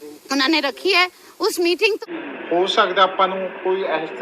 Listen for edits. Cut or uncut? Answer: cut